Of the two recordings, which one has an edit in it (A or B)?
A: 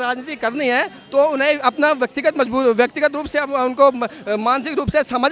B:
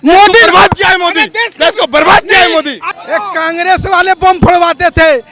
B